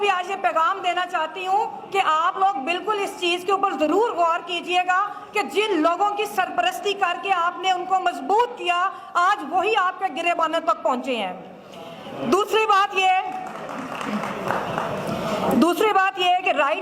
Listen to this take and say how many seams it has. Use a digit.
0